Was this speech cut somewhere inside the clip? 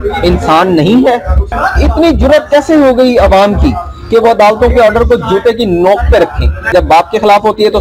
yes; 2 cuts; at 1.6 s, 6.7 s

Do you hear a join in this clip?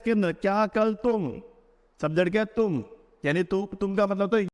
no; 0 cuts

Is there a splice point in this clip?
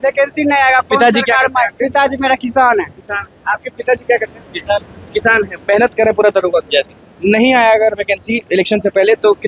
no; 0 cuts

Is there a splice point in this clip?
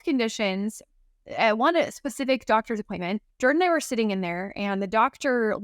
yes; 1 cut; at 3.3 s

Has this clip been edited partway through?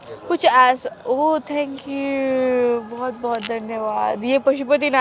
no; 0 cuts

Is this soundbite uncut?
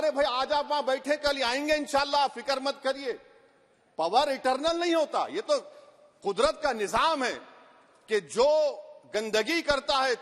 yes; 0 cuts

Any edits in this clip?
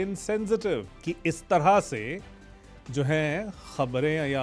yes; 1 cut; at 0.9 s

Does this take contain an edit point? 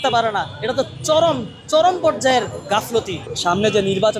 yes; 1 cut; at 3.2 s

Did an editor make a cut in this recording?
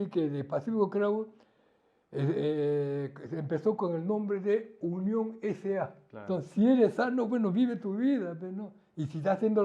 yes; 1 cut; at 6.1 s

